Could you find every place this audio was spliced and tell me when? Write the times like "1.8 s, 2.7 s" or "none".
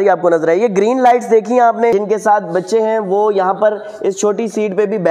1.9 s